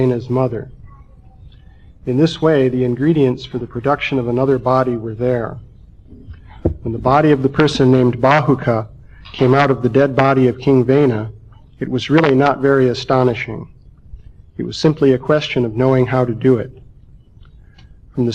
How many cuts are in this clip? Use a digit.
1